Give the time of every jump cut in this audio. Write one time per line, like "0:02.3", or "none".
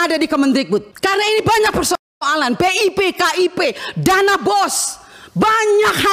0:00.9